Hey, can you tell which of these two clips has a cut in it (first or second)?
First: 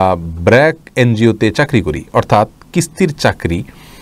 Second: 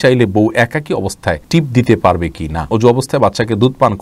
second